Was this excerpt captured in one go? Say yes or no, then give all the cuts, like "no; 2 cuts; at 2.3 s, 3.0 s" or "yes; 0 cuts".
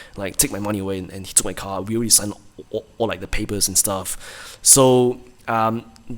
yes; 0 cuts